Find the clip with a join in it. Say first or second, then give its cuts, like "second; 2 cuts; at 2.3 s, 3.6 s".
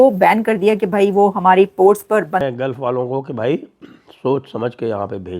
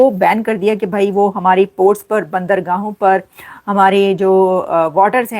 first; 1 cut; at 2.4 s